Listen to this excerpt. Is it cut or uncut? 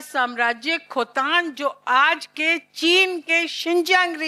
uncut